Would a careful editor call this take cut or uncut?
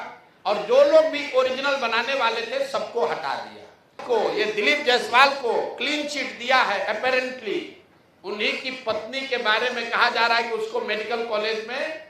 cut